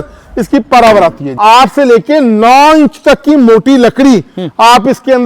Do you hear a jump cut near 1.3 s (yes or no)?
yes